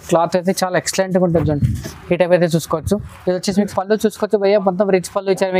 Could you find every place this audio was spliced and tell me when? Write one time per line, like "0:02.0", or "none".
0:03.7